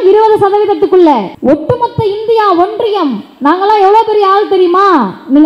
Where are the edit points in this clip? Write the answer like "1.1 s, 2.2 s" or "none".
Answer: 1.3 s